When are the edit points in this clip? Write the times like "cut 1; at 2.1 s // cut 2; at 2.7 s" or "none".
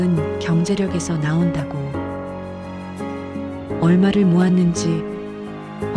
cut 1; at 1.5 s // cut 2; at 3.4 s